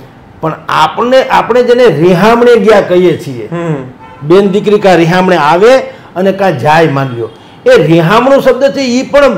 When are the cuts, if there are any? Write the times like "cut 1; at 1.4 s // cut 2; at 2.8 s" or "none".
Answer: none